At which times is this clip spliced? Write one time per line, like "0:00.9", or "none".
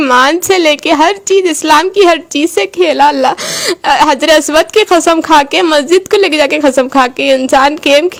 none